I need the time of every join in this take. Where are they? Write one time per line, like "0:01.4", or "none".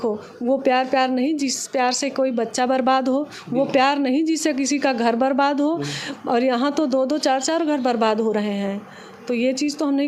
none

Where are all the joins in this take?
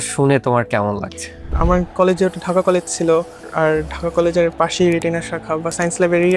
0:01.6

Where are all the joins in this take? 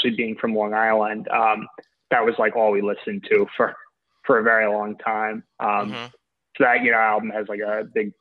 none

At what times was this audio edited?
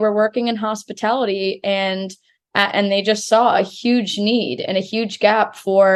none

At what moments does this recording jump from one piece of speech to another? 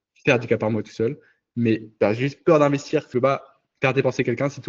0:01.9
0:03.1

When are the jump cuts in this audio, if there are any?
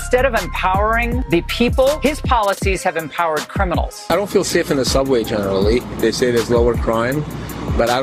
0:01.2
0:02.0
0:04.1

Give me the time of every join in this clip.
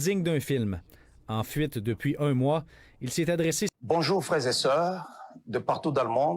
0:03.7

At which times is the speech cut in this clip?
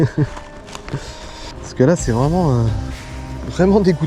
0:01.7

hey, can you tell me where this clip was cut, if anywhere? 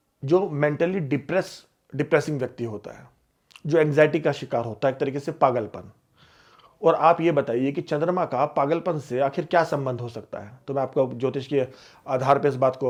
none

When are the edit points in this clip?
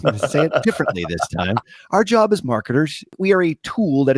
0:03.2

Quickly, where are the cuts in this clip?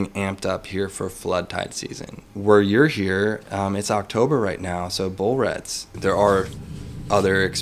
0:02.2
0:06.0

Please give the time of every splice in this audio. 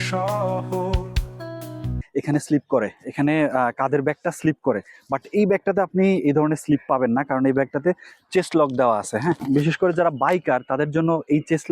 0:02.0
0:09.4

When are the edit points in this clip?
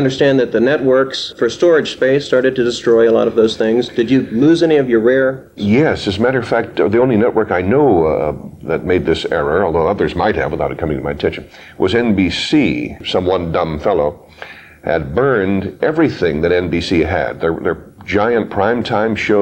0:01.3
0:05.6
0:13.0

